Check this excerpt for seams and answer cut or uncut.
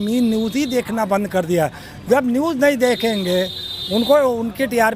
uncut